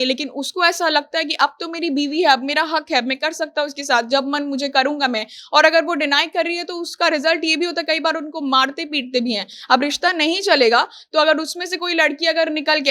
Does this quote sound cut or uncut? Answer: uncut